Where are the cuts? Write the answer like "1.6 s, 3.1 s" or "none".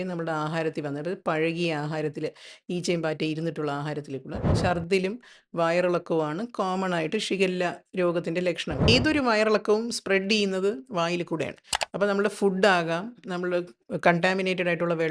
4.5 s, 8.9 s